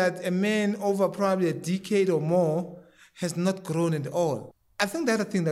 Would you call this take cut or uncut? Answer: cut